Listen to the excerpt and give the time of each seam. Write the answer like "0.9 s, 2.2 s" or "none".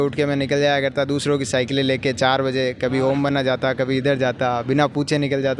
none